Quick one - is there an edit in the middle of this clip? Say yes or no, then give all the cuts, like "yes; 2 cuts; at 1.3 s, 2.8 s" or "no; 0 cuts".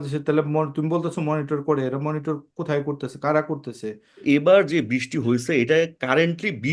yes; 1 cut; at 4.2 s